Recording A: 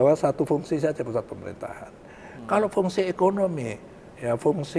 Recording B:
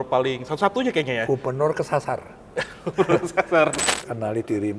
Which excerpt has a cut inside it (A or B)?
B